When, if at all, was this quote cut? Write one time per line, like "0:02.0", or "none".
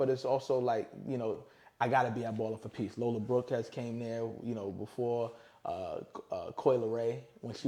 none